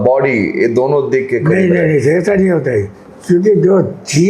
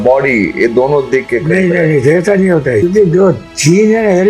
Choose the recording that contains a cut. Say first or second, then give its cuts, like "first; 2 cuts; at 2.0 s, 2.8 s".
second; 1 cut; at 2.8 s